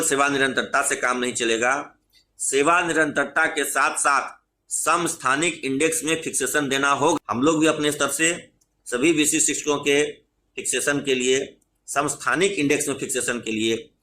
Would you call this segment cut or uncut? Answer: cut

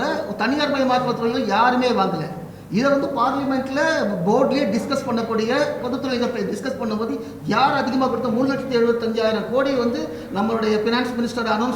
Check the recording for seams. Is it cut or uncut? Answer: uncut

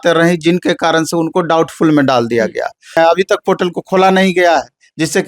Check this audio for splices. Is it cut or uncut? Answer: cut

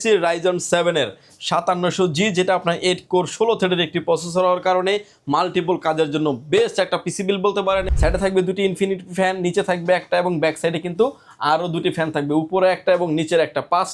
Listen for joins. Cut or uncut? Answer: cut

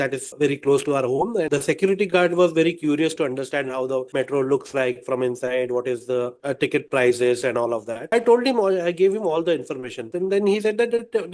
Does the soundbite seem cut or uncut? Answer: uncut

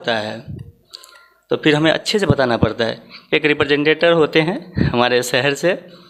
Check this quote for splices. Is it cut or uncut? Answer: uncut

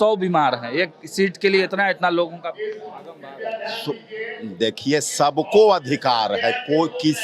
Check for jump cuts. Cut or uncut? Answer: uncut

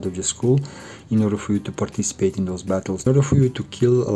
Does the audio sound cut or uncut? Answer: cut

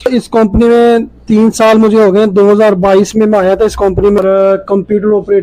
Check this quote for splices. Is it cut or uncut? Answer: cut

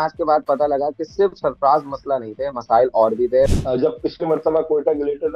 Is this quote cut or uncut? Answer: cut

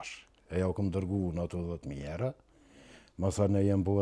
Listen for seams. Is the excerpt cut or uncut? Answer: uncut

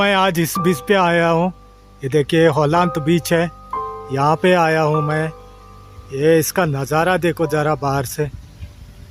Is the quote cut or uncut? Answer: uncut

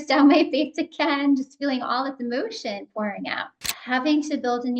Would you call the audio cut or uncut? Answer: cut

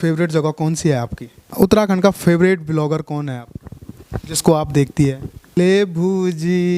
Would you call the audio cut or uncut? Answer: cut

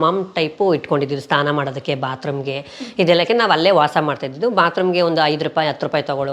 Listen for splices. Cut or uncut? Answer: uncut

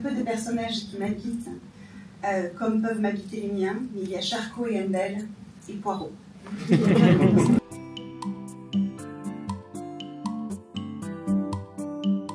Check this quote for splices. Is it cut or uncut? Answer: uncut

